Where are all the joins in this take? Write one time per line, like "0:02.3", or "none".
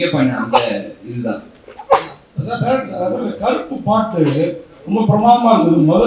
none

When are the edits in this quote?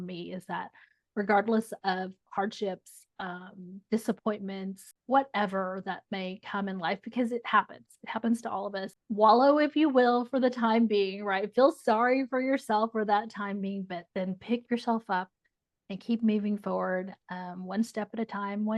0:04.9
0:09.0

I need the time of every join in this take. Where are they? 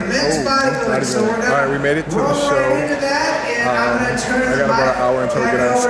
none

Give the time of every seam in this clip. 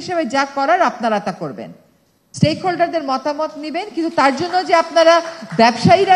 none

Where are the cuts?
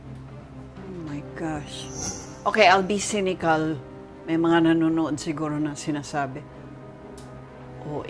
0:02.1

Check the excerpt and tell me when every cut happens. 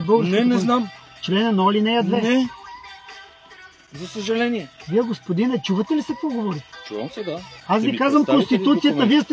0:01.0
0:02.5
0:04.7
0:07.5

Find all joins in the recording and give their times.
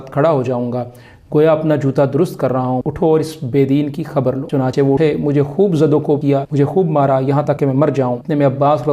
0:02.8
0:04.8
0:06.3
0:07.8

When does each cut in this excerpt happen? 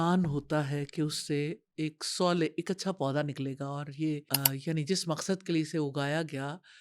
0:04.3

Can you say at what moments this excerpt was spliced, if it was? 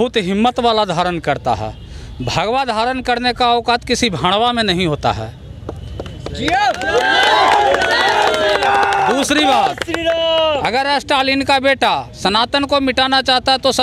none

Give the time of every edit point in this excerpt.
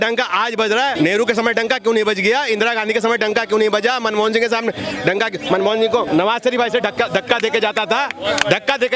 0:00.9
0:06.1

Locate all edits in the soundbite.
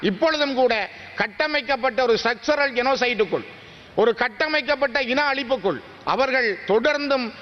none

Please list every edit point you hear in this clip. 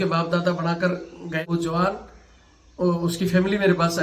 0:01.4

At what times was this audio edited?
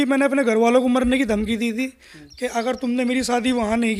none

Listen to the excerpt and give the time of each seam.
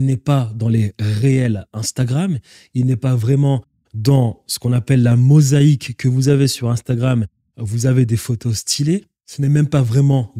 0:09.2

